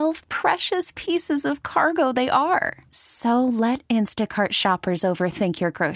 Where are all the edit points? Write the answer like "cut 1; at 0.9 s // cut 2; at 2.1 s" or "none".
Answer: none